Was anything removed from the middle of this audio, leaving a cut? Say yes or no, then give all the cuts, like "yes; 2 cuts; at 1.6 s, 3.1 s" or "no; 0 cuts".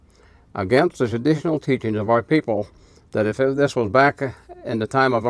no; 0 cuts